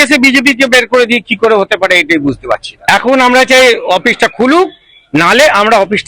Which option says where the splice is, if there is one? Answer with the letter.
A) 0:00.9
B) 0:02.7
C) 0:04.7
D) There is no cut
B